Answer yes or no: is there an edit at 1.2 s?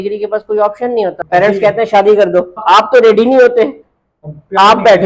yes